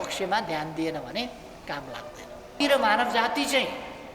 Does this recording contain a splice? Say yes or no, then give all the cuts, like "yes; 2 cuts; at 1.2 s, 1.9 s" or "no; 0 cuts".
yes; 1 cut; at 2.6 s